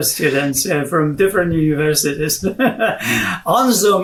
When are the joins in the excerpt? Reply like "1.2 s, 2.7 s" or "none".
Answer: none